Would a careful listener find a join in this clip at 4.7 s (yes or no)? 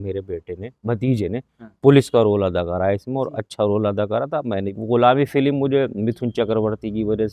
yes